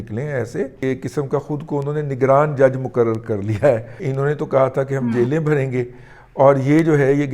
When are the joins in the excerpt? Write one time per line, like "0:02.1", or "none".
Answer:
0:00.8
0:04.0